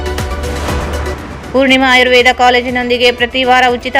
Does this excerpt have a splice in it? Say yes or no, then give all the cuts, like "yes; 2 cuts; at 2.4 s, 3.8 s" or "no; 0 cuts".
yes; 1 cut; at 1.0 s